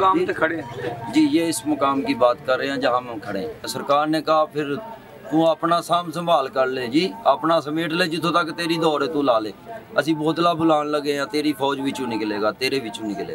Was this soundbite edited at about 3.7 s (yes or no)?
yes